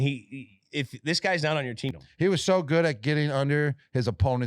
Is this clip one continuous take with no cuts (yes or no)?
no